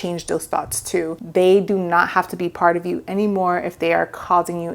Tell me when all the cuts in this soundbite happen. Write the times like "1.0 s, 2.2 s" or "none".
1.2 s